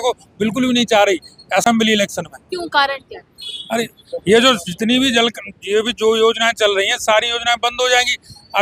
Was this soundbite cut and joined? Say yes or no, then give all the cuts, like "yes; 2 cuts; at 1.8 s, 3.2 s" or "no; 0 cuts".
no; 0 cuts